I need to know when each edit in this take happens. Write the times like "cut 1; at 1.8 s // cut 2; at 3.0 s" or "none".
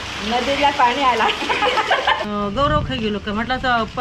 cut 1; at 2.2 s